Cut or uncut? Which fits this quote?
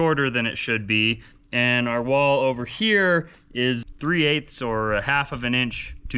cut